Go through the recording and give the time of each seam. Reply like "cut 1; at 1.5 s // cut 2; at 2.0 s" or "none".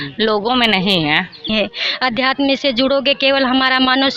cut 1; at 1.5 s